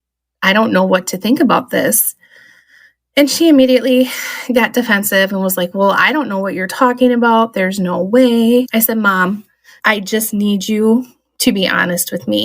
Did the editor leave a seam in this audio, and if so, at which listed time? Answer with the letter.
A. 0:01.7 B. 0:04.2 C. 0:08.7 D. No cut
C